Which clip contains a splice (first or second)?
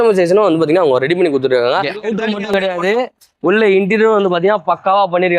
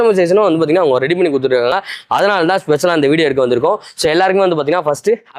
first